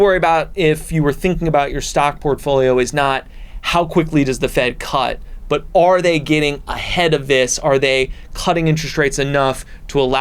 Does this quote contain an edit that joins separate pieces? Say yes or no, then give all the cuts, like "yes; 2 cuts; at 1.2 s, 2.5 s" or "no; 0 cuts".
no; 0 cuts